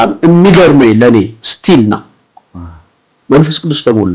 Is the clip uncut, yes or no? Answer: yes